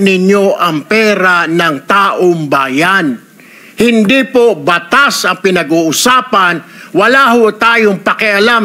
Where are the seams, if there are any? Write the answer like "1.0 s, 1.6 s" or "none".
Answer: none

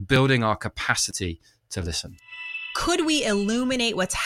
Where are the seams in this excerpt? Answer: 2.6 s

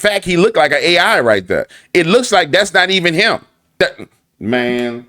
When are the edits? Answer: 3.8 s

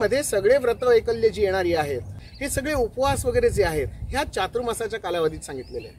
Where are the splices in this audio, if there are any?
2.3 s

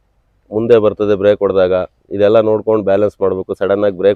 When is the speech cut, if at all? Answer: none

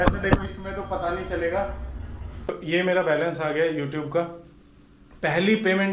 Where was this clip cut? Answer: 2.6 s

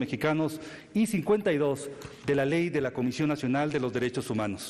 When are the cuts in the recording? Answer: 1.1 s

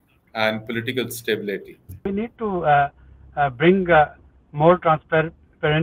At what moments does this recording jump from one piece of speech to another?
2.0 s

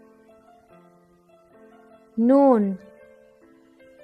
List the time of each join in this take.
none

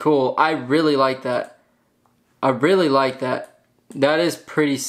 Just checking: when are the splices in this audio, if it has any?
none

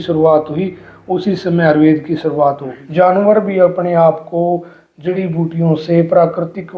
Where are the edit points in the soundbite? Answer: 2.8 s

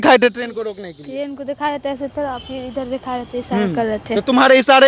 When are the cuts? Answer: none

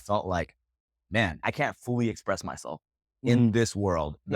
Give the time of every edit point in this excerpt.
1.4 s

